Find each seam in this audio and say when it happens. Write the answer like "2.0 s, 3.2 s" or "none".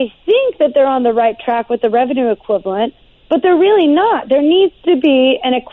none

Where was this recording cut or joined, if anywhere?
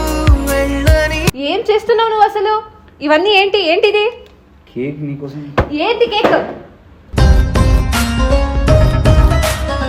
none

